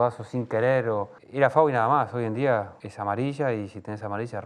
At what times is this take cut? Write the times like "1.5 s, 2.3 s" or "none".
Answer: 1.2 s, 2.8 s